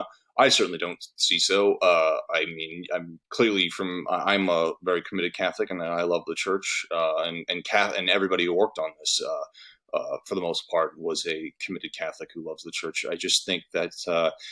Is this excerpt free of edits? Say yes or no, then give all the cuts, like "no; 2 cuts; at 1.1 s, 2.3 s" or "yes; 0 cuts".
yes; 0 cuts